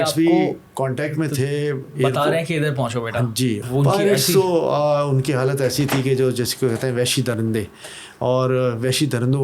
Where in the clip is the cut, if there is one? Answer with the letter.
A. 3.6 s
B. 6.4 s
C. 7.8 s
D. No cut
A